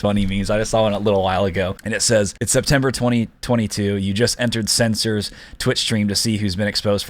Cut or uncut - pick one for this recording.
cut